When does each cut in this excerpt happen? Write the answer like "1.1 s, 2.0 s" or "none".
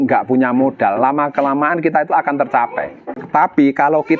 3.2 s